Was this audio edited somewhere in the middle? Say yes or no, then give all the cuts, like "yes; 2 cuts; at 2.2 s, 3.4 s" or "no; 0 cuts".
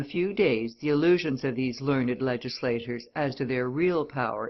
no; 0 cuts